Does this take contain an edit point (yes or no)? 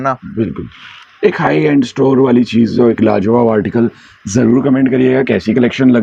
no